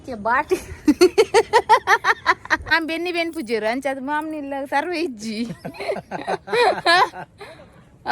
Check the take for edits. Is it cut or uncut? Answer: cut